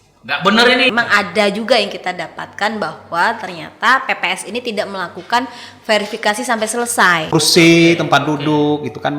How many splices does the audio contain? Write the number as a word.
two